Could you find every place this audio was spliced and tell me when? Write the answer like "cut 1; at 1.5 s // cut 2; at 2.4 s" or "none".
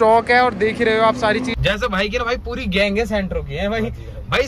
cut 1; at 1.5 s